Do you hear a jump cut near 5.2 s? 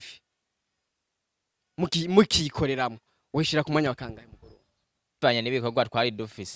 yes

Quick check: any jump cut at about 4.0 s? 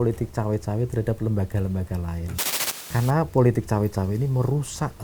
no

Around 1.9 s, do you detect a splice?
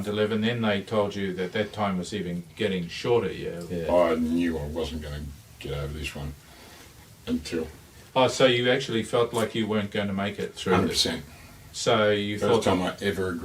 no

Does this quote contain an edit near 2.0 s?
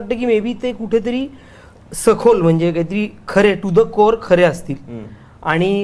no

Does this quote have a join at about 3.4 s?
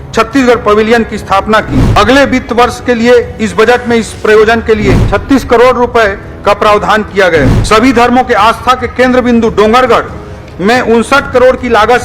no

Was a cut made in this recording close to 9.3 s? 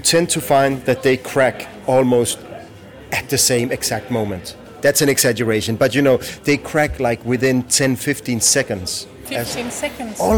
yes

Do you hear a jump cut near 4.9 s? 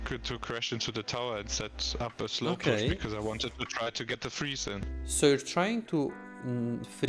yes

